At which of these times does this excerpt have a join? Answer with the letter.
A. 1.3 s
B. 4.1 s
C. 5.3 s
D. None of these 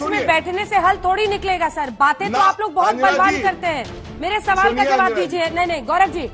D